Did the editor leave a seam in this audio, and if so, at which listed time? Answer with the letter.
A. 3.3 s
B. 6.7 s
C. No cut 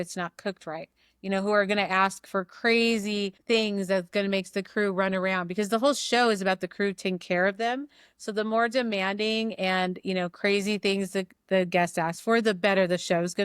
A